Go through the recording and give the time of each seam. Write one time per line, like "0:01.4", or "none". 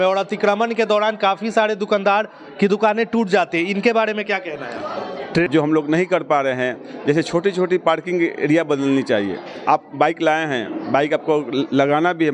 0:05.5